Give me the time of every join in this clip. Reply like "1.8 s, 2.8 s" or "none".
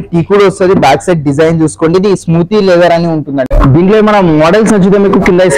3.5 s

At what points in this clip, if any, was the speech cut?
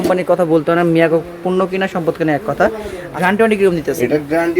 3.1 s

